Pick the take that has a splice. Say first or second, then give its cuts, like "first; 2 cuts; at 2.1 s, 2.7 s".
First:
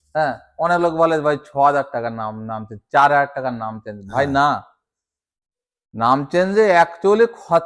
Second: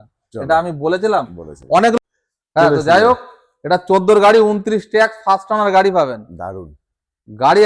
second; 1 cut; at 2.0 s